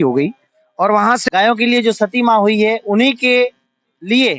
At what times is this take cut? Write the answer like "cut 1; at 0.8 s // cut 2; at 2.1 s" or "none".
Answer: cut 1; at 1.2 s